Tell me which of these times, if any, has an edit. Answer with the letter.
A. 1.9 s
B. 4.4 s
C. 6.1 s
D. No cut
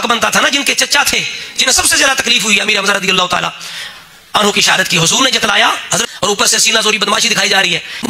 C